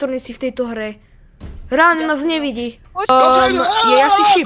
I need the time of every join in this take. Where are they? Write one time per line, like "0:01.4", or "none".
0:02.9